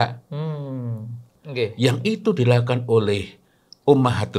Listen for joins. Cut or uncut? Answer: cut